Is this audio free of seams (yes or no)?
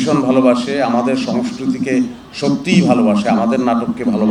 yes